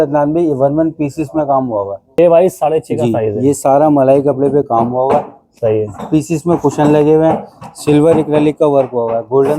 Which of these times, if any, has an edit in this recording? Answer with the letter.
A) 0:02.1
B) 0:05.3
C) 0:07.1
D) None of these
A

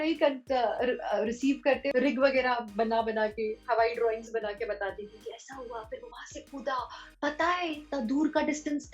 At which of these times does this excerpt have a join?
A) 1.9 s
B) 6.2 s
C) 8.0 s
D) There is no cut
A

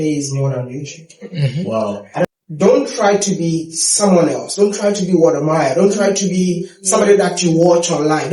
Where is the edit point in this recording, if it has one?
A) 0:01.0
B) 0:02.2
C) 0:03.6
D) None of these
B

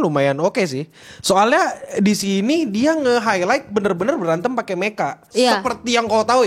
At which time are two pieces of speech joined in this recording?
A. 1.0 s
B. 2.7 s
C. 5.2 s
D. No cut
C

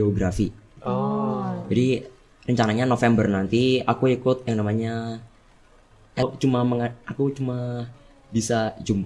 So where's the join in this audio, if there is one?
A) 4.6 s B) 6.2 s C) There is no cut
B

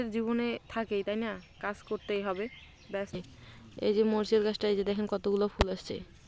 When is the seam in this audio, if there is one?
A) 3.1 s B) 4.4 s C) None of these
A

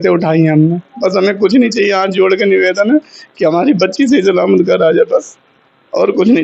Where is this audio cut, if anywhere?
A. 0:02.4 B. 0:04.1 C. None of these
C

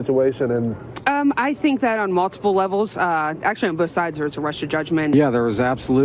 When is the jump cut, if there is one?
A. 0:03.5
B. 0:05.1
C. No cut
B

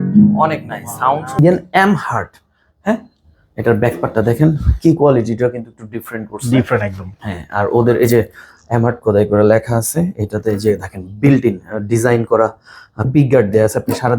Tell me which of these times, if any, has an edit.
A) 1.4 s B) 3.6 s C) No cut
A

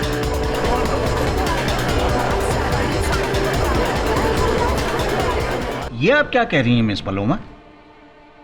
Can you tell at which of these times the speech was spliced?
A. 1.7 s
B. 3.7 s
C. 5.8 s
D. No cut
C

